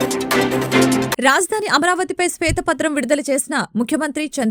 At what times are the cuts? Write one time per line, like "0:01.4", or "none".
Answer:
0:01.1